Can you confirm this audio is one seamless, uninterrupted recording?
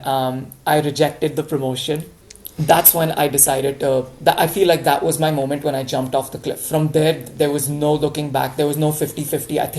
no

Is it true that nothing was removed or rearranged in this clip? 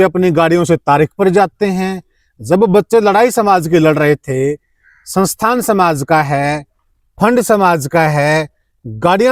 yes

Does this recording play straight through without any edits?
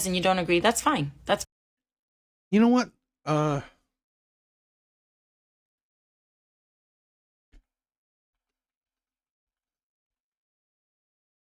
yes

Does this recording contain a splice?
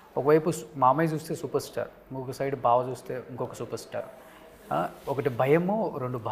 no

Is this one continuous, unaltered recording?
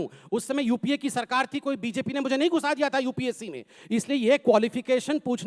no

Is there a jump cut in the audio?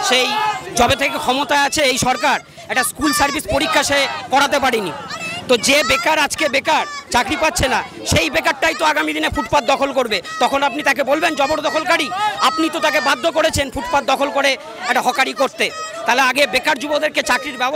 no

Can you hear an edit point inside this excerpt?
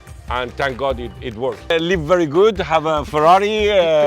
yes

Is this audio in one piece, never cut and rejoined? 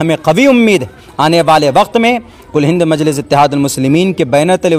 yes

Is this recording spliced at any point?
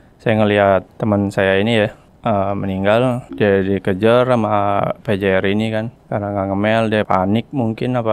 yes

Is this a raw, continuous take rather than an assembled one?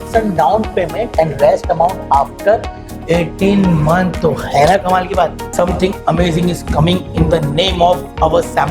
no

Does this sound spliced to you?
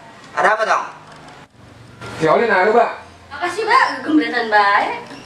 yes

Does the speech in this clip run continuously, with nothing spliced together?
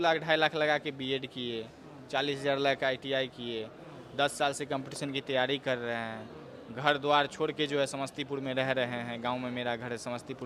yes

